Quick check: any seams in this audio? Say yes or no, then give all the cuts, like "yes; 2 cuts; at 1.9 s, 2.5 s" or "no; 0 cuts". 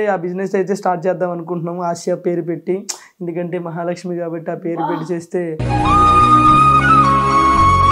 no; 0 cuts